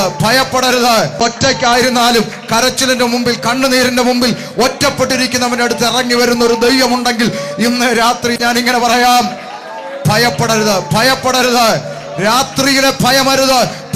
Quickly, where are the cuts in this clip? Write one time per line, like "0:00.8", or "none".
0:01.2
0:08.4